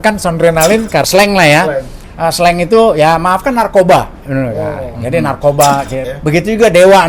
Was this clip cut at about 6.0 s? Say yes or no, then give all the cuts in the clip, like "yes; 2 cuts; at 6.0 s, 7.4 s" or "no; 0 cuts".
yes; 2 cuts; at 1.1 s, 6.0 s